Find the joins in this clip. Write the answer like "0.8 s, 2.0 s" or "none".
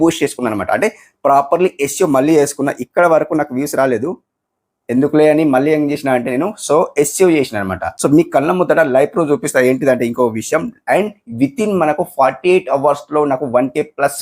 7.9 s